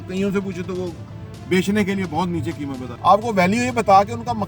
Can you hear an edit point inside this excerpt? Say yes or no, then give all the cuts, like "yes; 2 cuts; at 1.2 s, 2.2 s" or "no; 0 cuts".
yes; 1 cut; at 2.8 s